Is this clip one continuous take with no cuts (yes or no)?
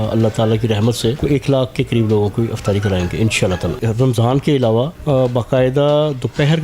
no